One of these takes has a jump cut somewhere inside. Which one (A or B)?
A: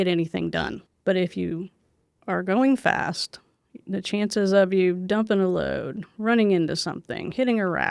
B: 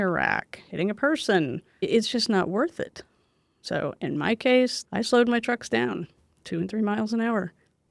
B